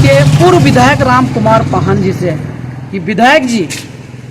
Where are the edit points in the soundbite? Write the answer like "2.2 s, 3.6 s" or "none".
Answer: none